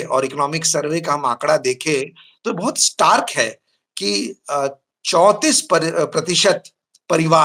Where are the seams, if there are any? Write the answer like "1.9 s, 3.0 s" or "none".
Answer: none